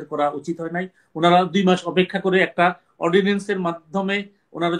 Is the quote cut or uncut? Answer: uncut